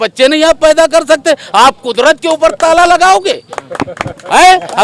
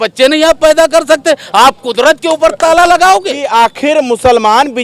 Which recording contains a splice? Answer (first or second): second